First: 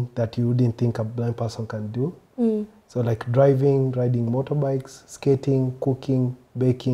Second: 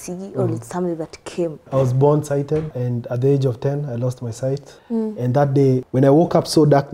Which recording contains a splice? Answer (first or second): second